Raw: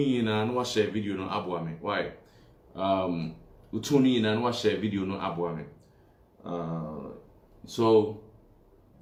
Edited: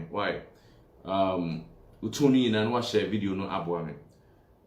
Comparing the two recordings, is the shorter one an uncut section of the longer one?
yes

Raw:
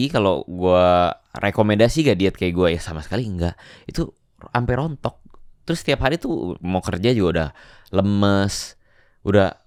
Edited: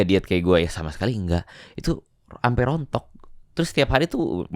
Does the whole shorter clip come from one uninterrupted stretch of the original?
yes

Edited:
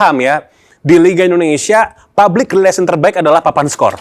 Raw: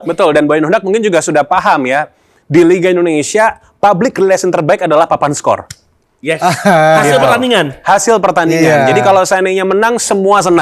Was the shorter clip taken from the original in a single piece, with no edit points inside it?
yes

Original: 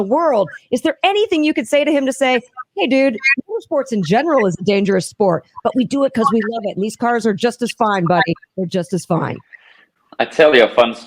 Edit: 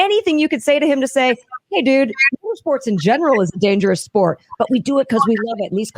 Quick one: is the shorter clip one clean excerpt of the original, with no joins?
yes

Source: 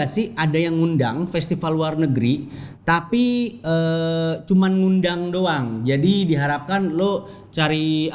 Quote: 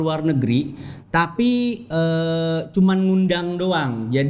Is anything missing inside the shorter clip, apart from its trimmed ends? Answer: no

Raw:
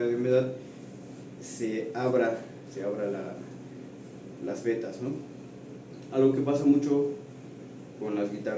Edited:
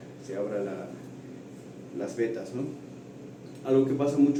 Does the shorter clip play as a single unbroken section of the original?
yes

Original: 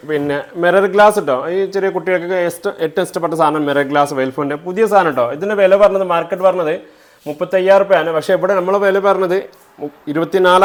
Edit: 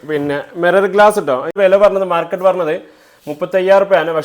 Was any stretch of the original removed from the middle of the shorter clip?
yes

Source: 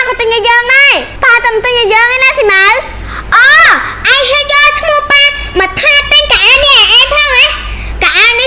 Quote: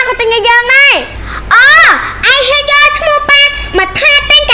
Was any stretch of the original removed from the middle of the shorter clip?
yes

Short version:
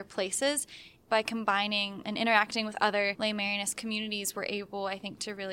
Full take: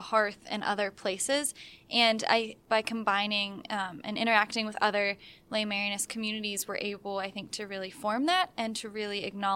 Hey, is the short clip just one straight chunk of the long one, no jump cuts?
no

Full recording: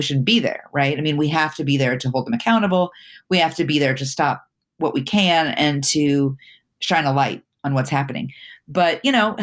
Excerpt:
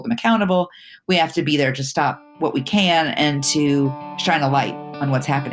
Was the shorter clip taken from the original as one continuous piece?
no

